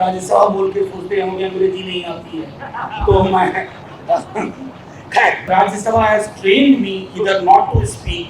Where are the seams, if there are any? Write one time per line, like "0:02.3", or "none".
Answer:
0:05.5